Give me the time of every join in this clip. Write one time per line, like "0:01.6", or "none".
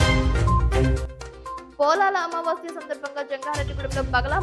0:01.7